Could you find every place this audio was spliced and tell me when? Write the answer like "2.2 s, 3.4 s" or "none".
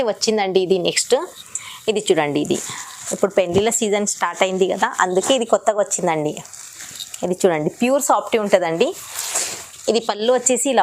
none